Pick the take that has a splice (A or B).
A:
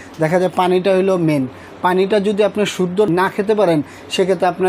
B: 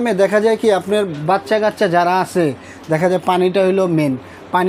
A